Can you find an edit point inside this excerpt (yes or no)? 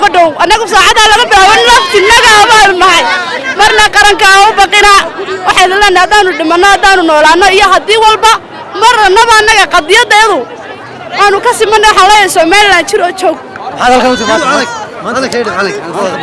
no